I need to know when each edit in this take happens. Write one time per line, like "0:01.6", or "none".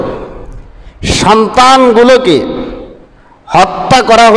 none